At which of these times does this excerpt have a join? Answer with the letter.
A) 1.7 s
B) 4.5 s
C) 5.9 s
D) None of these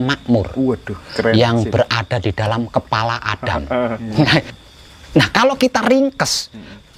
B